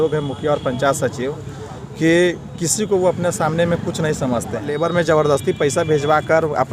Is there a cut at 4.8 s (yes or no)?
yes